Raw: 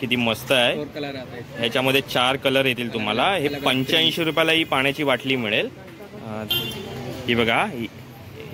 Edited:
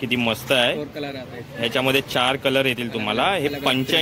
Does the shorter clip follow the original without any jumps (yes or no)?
yes